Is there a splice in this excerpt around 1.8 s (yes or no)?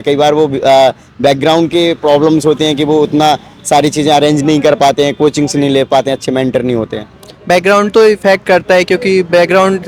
no